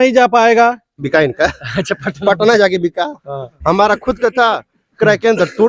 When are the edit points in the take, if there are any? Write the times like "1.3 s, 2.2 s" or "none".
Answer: 1.0 s